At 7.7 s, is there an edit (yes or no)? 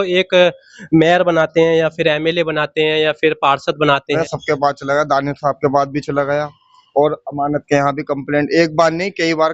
no